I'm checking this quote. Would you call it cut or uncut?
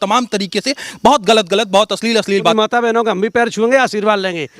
cut